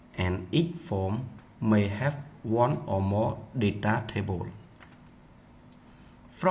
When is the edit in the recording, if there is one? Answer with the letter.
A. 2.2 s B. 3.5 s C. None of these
A